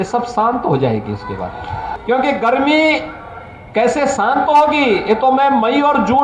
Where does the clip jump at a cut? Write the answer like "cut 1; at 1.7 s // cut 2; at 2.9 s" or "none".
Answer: cut 1; at 1.9 s